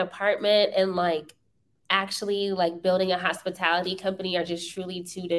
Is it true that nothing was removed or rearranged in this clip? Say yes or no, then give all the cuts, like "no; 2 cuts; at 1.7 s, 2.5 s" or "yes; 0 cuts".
yes; 0 cuts